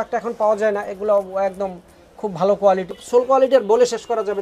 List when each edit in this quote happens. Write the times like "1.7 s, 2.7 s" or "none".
3.0 s